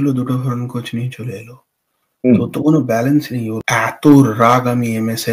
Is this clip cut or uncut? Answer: cut